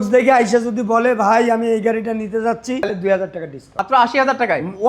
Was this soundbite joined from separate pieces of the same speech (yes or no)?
yes